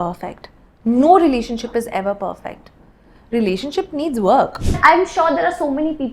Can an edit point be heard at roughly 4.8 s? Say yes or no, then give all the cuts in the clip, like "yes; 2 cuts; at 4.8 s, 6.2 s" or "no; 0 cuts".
yes; 1 cut; at 4.8 s